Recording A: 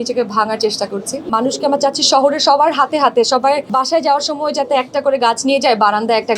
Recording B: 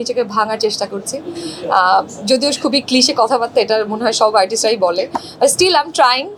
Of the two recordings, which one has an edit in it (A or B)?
A